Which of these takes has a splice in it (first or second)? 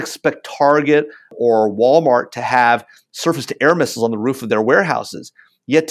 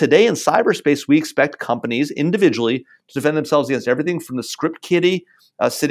first